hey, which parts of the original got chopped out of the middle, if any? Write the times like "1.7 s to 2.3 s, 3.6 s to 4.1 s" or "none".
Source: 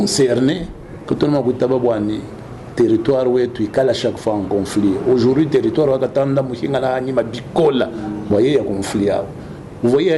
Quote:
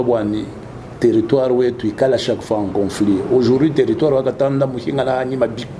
none